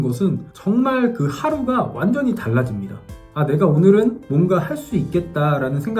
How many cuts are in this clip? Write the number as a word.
one